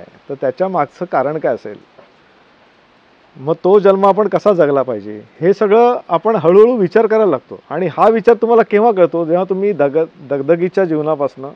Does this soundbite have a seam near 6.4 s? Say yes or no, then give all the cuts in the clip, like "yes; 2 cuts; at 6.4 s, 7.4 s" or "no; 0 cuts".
no; 0 cuts